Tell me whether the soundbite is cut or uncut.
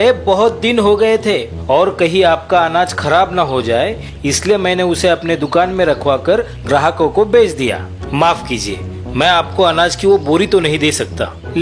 uncut